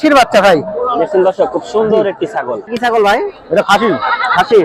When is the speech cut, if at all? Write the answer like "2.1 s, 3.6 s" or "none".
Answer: 2.7 s